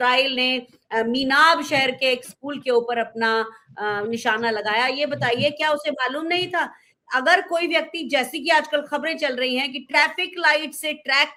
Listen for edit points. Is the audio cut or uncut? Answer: uncut